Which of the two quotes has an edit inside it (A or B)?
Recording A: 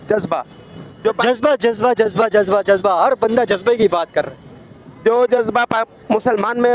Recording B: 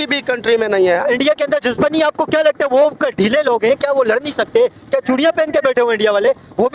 B